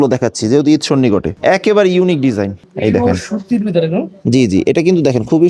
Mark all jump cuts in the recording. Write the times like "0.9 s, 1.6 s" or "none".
1.3 s